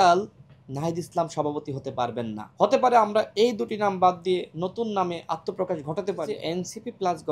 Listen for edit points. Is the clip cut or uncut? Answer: cut